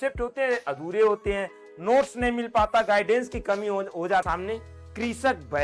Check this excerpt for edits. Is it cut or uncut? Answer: cut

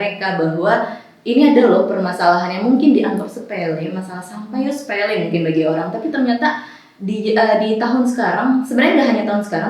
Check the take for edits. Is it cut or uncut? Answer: uncut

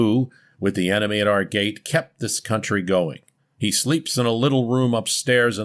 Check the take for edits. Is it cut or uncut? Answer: uncut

